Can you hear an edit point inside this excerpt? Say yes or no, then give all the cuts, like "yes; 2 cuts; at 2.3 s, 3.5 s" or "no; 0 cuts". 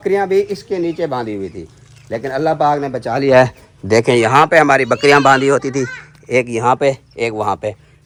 no; 0 cuts